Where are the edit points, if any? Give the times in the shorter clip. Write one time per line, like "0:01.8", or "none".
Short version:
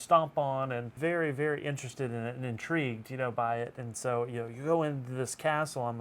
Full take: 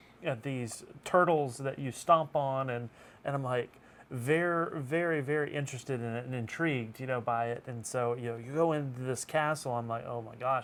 0:00.9

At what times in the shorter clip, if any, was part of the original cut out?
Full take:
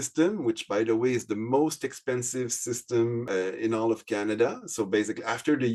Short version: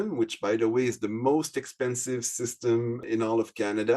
0:03.0

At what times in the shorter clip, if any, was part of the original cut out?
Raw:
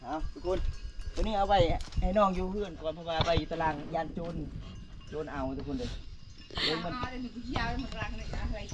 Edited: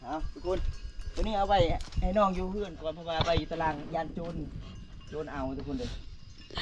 none

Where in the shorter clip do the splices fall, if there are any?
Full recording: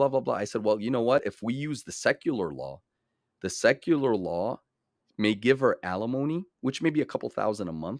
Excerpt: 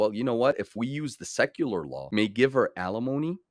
0:02.0

